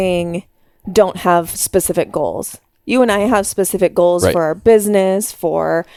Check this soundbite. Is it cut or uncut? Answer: uncut